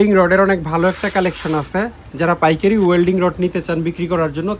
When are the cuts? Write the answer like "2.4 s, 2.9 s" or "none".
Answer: none